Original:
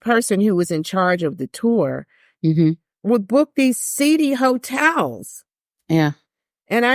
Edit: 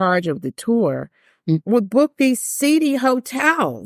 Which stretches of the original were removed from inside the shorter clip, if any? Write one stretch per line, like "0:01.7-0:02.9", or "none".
0:02.5-0:03.0